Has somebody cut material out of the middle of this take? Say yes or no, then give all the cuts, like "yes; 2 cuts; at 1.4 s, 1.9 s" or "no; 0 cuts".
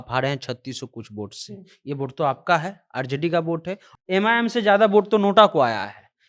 yes; 1 cut; at 3.9 s